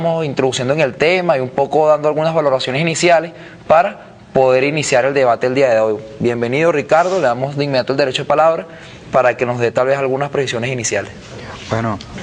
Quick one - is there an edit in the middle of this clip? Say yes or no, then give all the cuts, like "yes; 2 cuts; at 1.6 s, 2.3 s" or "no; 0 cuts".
yes; 1 cut; at 1.9 s